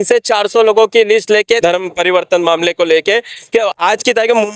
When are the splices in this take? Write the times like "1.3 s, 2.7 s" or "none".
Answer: 1.6 s